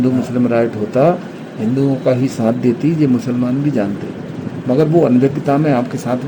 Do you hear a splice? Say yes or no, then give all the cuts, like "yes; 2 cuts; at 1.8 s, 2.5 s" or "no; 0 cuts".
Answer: no; 0 cuts